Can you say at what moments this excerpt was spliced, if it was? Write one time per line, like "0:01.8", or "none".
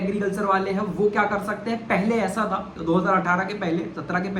none